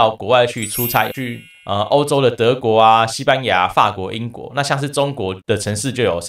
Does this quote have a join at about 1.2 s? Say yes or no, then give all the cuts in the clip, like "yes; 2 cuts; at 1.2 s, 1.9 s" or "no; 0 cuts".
yes; 1 cut; at 1.2 s